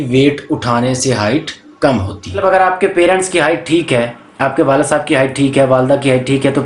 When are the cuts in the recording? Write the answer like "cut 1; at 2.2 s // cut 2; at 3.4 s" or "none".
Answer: cut 1; at 2.4 s